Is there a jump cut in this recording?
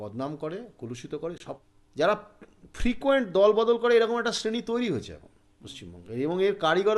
yes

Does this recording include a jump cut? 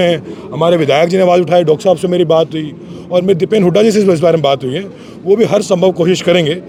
no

